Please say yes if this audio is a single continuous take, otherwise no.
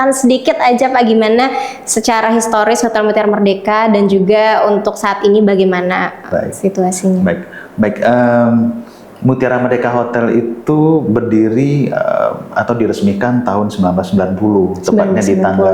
yes